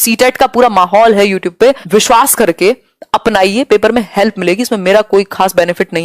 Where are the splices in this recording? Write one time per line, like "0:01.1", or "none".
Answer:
0:01.8